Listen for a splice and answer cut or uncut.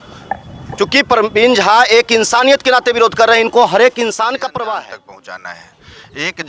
cut